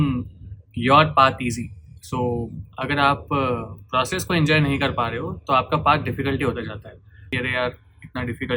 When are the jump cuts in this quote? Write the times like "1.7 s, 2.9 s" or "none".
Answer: 7.3 s